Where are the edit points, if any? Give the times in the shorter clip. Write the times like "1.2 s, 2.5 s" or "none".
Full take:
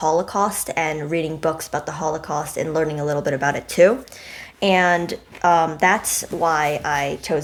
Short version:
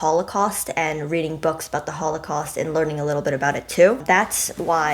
4.0 s